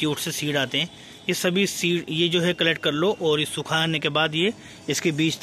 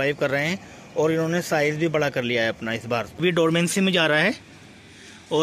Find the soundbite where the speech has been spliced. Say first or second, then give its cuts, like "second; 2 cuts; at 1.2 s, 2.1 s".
second; 1 cut; at 3.1 s